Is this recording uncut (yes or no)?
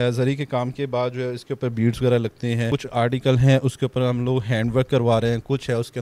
yes